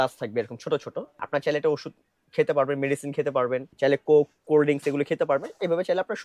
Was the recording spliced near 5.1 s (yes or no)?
no